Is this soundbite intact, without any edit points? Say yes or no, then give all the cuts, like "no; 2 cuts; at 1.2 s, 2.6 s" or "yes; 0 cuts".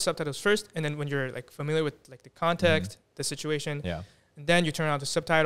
yes; 0 cuts